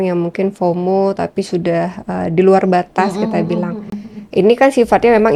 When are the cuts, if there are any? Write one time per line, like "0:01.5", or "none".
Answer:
none

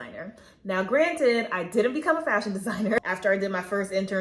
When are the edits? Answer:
0:03.0

